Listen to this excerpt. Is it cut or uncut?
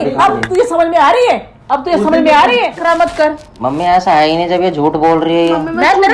cut